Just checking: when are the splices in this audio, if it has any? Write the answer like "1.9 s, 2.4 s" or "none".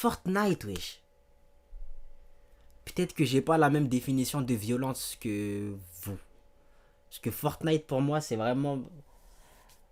none